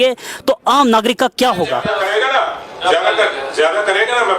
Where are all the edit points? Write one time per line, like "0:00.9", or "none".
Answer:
0:01.9